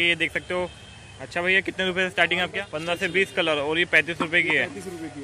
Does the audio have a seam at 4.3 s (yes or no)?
no